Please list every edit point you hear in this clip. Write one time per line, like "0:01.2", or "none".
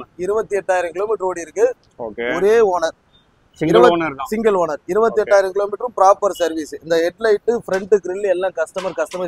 none